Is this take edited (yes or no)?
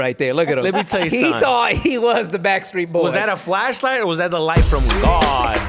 no